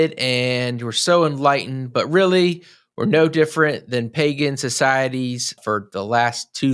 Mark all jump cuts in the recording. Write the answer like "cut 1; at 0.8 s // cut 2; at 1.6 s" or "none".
cut 1; at 5.6 s